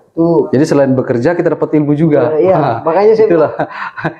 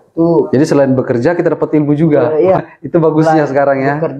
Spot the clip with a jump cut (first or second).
second